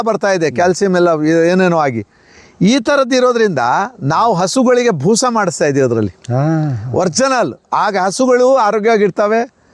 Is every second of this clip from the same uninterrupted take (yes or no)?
yes